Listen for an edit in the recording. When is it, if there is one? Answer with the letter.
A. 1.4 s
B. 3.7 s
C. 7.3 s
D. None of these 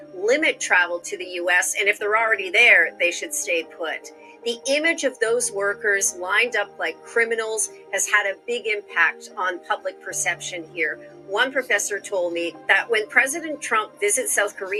D